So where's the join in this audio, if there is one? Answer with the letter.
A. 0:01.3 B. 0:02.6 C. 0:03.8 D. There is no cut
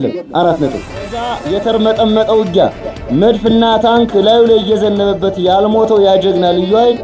A